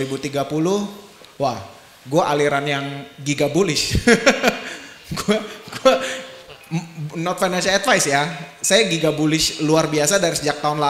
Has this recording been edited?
no; 0 cuts

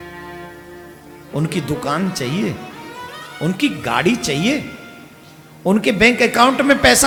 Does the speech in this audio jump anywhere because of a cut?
no; 0 cuts

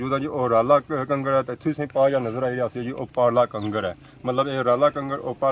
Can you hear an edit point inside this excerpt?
no; 0 cuts

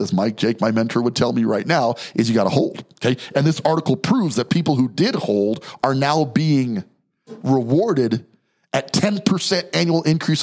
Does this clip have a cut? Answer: no; 0 cuts

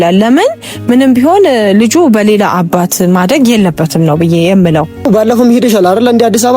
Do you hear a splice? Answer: yes; 1 cut; at 5.1 s

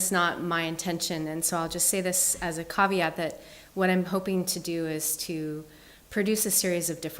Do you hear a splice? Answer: yes; 1 cut; at 6.0 s

